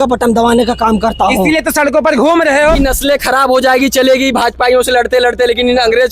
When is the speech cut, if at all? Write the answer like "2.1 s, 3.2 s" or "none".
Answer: 2.8 s